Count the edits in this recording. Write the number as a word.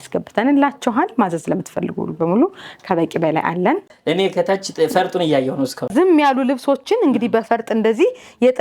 two